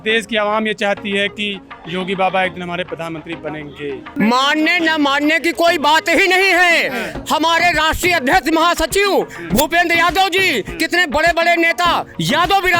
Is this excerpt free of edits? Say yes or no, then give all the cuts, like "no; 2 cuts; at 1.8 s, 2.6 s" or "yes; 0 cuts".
no; 1 cut; at 4.1 s